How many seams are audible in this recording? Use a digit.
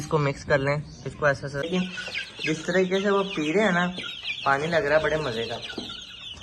1